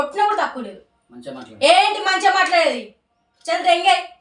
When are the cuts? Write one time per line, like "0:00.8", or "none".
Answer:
none